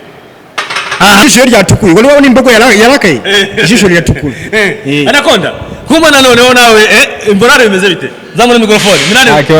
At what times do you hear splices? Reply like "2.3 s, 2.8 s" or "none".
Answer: 1.2 s